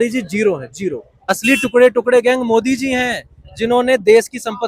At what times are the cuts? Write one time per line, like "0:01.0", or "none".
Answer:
0:01.3